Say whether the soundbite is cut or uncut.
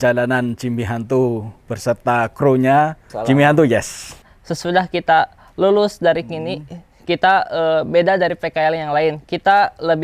cut